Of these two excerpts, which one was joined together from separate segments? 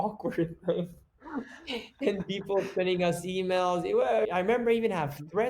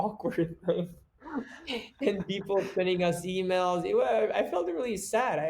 first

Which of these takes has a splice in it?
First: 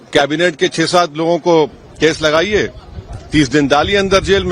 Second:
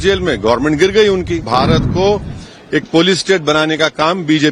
second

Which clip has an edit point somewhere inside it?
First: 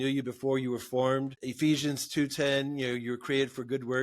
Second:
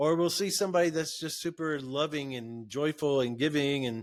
first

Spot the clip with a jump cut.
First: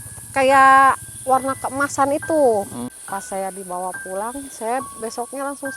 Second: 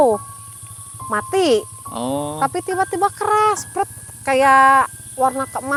first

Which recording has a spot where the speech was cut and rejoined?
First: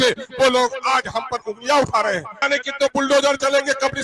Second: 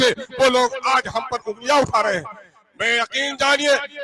first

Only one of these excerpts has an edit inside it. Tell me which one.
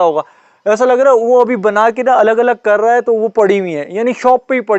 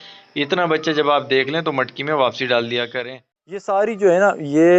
second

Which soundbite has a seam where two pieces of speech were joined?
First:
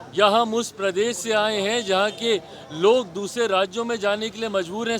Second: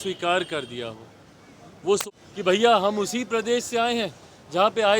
second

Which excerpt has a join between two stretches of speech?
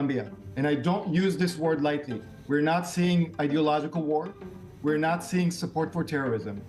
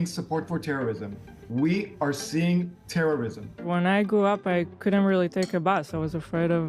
second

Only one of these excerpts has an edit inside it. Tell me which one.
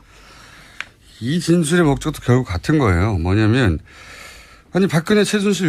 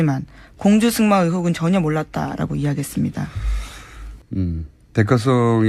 first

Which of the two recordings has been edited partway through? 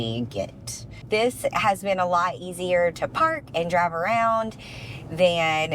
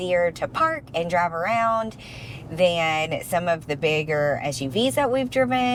first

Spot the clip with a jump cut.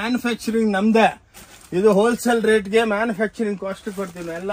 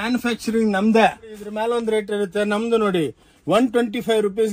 second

